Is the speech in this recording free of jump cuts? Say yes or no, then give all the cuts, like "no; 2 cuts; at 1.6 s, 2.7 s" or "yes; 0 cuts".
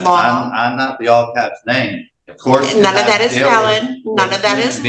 yes; 0 cuts